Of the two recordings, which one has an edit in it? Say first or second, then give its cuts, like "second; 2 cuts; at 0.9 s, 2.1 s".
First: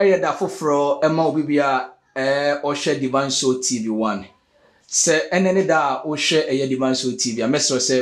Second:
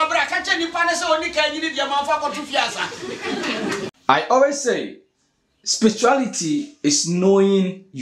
second; 1 cut; at 4.0 s